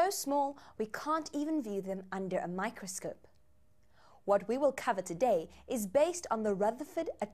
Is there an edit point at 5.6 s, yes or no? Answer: no